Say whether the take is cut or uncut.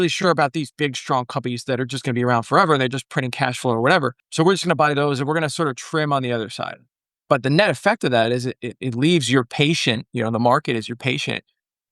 cut